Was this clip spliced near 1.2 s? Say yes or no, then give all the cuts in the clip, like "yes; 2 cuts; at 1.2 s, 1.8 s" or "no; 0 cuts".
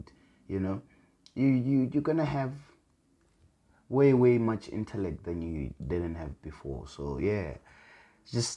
no; 0 cuts